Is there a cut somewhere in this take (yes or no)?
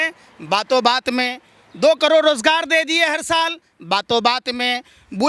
no